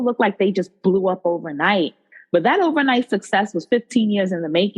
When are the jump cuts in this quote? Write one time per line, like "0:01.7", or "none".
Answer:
0:02.1